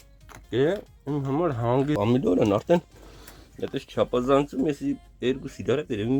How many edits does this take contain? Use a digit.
1